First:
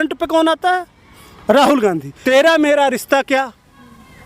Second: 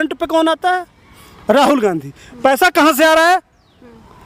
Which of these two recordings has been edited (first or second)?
first